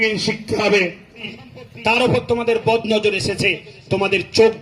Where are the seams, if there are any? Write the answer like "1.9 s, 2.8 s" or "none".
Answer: 1.4 s

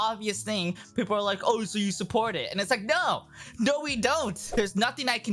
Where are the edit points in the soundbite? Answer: 4.4 s

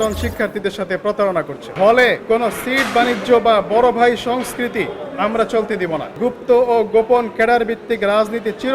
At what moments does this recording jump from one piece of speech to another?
1.6 s, 2.2 s, 6.1 s

